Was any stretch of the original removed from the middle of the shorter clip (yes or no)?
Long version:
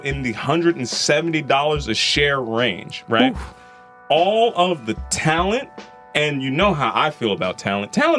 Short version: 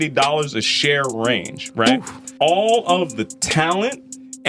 yes